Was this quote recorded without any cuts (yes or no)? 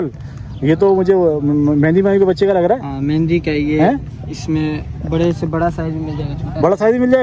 yes